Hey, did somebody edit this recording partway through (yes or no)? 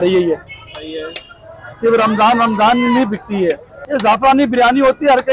yes